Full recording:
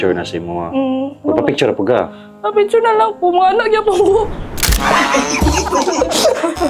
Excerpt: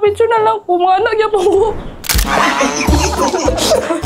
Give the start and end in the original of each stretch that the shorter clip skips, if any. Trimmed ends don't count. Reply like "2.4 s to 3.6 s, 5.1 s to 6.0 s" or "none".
none